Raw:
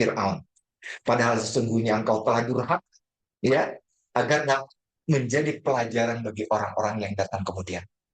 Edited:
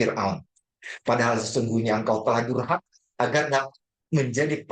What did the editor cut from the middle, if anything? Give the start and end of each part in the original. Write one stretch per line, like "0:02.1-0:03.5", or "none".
0:03.0-0:03.9